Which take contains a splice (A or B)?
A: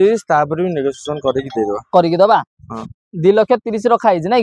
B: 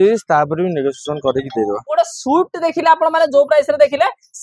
B